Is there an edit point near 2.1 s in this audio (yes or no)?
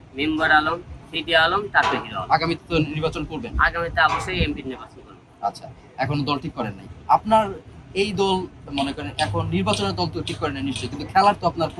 no